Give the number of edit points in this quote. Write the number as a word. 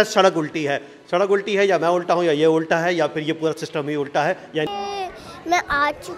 one